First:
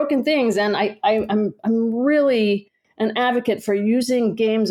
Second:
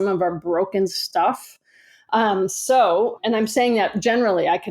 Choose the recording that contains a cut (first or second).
second